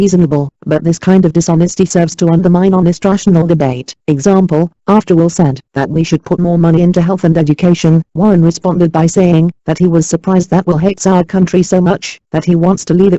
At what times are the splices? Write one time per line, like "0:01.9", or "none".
0:11.1

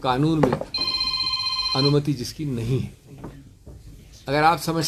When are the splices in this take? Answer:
none

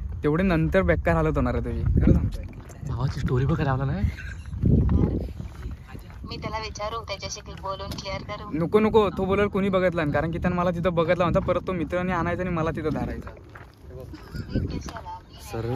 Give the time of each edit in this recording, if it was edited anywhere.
none

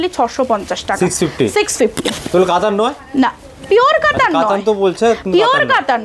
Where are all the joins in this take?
none

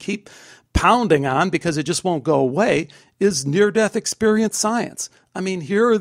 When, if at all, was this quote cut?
none

